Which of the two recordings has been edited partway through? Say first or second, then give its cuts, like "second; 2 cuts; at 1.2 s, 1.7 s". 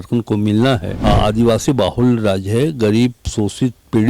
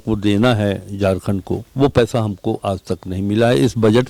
first; 1 cut; at 0.9 s